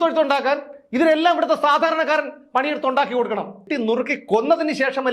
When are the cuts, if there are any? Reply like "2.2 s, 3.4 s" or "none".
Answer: 3.6 s